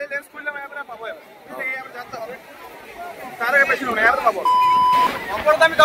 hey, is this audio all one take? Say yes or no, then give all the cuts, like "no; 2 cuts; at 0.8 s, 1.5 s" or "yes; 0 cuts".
no; 1 cut; at 4.9 s